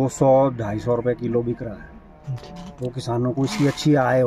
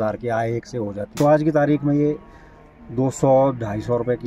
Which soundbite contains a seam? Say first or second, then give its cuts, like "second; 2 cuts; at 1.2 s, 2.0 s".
second; 1 cut; at 1.1 s